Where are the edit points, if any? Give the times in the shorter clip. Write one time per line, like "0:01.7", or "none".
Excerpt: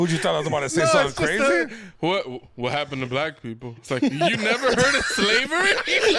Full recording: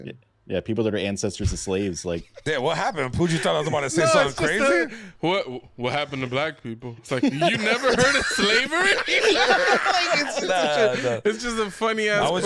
none